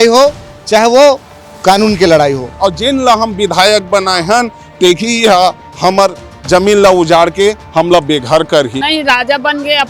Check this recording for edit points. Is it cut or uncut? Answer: cut